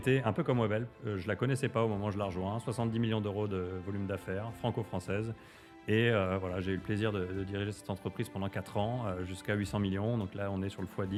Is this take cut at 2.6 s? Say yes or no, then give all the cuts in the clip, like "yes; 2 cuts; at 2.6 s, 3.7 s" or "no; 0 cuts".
no; 0 cuts